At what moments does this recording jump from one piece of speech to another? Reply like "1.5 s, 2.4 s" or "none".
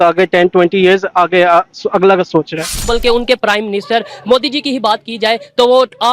2.9 s